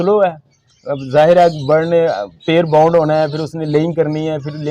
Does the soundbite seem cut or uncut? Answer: uncut